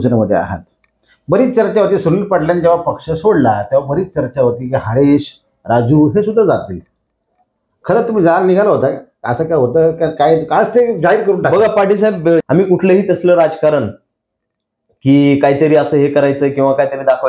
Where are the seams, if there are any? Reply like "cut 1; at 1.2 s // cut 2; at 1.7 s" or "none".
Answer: cut 1; at 12.4 s